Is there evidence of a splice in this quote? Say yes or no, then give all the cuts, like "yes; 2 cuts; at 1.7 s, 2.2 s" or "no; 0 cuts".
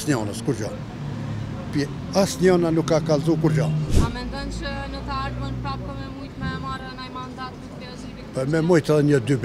yes; 1 cut; at 3.9 s